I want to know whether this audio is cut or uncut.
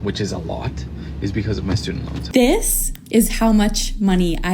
cut